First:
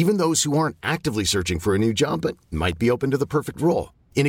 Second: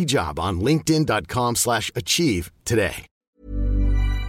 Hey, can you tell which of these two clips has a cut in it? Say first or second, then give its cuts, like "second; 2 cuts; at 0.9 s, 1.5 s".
second; 1 cut; at 3.2 s